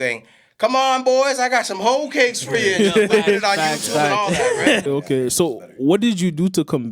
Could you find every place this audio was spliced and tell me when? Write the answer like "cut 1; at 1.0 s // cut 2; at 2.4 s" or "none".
cut 1; at 4.9 s